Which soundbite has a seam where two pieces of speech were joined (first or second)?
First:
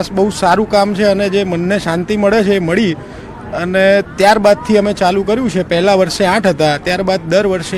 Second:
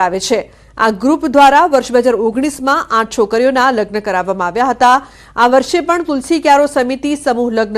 second